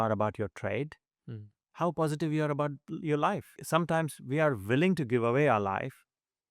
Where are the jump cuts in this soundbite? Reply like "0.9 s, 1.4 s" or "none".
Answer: 3.6 s

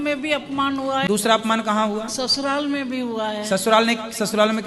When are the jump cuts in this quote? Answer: 1.1 s

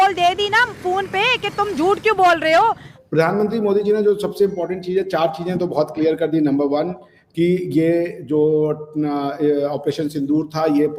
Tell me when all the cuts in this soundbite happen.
2.9 s

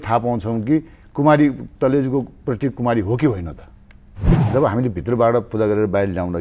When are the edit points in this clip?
4.2 s

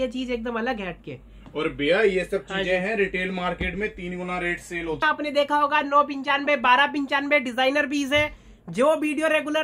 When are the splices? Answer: 5.0 s

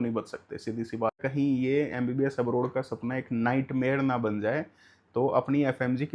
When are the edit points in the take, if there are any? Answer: 1.2 s

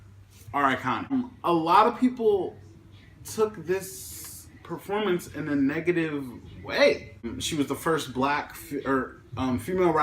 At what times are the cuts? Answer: 1.1 s, 7.3 s

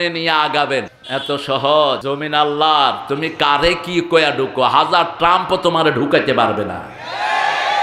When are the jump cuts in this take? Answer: 1.0 s, 2.0 s

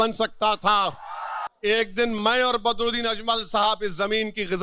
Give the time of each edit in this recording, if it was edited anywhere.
1.4 s

